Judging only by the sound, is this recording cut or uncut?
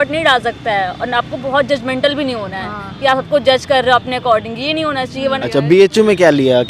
cut